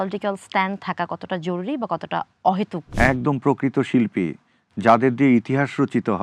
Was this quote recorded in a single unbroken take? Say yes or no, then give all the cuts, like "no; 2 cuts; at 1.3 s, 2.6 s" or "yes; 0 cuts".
no; 1 cut; at 2.8 s